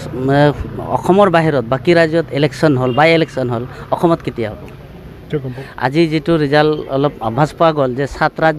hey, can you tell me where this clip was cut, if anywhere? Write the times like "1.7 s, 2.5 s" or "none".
5.2 s